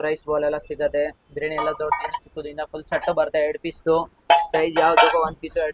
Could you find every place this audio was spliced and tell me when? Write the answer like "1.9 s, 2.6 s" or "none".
none